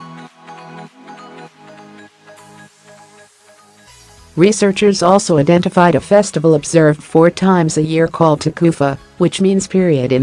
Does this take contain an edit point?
yes; 1 cut; at 4.2 s

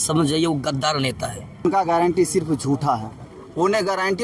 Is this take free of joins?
no; 1 cut; at 1.7 s

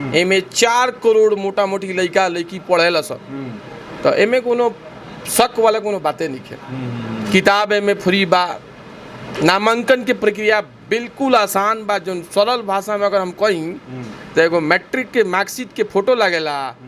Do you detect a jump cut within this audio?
no; 0 cuts

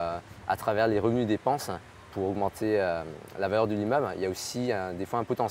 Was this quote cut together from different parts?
no; 0 cuts

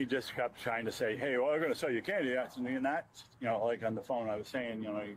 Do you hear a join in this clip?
no; 0 cuts

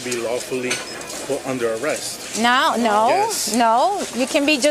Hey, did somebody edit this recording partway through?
no; 0 cuts

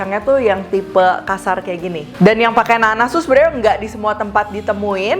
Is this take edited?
no; 0 cuts

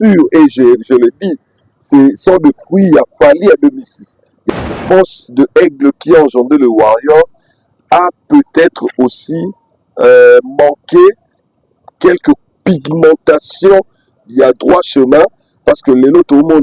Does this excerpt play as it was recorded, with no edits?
no; 1 cut; at 4.5 s

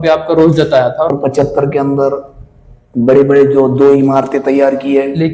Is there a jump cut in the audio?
yes; 1 cut; at 1.1 s

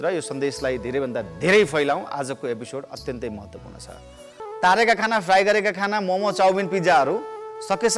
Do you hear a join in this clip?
yes; 1 cut; at 4.4 s

